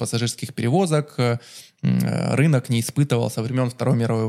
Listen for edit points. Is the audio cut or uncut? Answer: uncut